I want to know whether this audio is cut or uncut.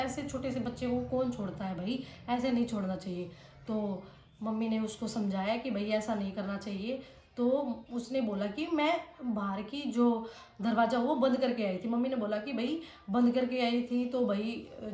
uncut